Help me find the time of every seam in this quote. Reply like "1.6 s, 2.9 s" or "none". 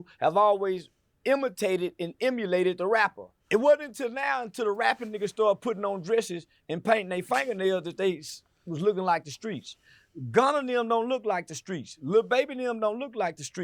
3.3 s